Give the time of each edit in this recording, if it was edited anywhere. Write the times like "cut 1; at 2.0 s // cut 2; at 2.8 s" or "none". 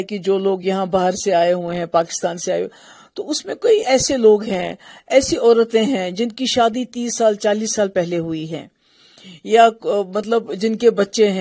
none